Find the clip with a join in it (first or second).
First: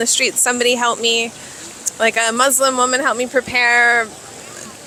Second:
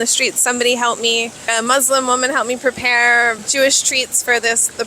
second